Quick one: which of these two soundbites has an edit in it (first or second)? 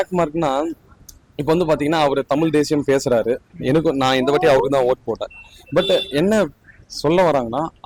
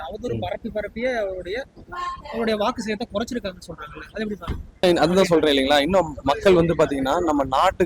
second